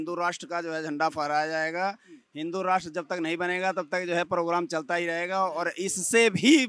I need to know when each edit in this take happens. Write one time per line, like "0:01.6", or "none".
none